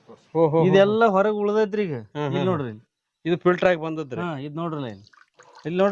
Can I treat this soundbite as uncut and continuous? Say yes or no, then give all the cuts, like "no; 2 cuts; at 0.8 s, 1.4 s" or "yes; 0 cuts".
yes; 0 cuts